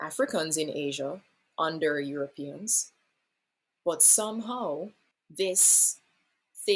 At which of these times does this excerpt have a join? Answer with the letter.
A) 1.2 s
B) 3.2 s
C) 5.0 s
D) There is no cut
C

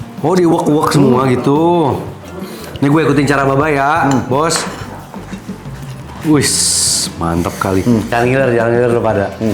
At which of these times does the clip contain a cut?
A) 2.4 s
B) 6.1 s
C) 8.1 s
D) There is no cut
C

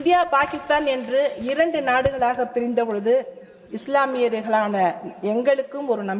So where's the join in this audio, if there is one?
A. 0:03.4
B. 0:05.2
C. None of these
C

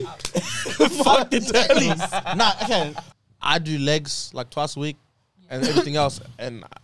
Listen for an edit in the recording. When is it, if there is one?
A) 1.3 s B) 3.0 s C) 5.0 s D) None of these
B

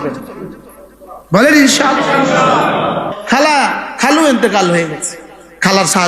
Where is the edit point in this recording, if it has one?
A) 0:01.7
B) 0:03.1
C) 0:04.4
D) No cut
B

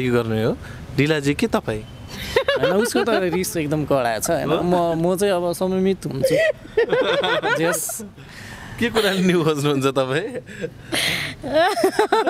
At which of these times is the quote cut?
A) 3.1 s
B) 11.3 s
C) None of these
C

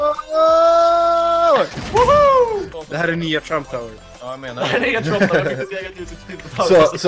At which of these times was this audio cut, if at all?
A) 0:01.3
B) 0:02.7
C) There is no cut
B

